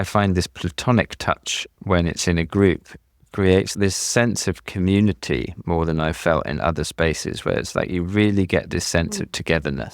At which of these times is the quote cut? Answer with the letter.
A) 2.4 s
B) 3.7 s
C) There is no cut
B